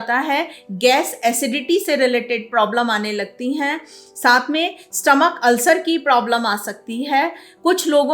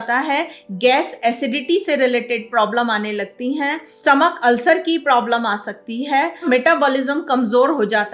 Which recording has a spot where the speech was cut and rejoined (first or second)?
second